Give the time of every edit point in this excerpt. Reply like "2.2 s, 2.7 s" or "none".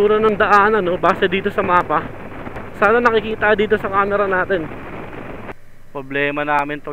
5.5 s